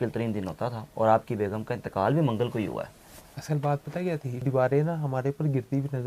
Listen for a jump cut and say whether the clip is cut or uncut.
cut